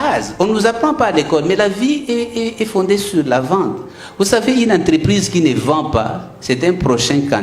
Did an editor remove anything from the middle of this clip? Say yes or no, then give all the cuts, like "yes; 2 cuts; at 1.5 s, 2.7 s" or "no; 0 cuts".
no; 0 cuts